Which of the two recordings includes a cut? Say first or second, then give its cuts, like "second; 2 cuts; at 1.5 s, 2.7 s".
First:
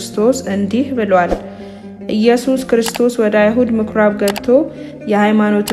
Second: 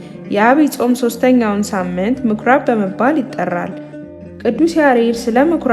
second; 1 cut; at 4.1 s